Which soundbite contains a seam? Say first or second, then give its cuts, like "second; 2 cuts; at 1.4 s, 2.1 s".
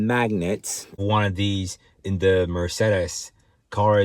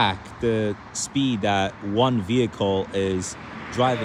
first; 1 cut; at 1.0 s